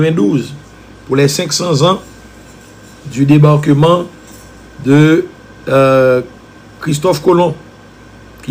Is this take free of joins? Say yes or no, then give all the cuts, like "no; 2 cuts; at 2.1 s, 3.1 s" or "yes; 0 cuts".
yes; 0 cuts